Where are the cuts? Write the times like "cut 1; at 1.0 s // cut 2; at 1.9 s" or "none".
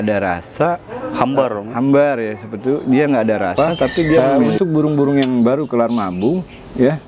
cut 1; at 4.4 s